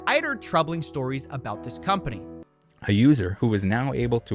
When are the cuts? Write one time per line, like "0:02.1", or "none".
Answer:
0:02.2